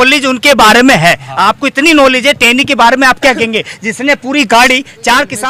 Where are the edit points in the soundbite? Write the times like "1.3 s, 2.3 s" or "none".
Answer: none